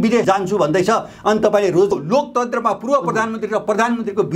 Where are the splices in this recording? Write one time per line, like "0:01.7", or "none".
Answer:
0:01.9